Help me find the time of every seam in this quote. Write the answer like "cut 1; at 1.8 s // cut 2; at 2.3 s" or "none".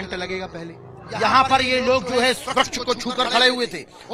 cut 1; at 1.0 s